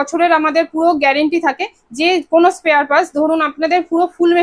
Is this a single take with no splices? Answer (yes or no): yes